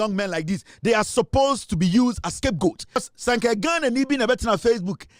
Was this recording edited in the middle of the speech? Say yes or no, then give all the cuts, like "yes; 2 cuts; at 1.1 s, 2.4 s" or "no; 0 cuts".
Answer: yes; 1 cut; at 3.0 s